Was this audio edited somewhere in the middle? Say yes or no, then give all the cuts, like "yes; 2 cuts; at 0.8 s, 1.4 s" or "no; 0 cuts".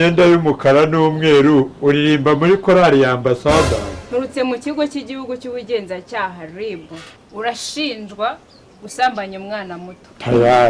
no; 0 cuts